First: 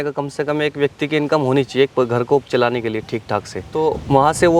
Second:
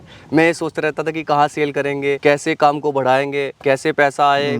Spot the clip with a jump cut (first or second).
second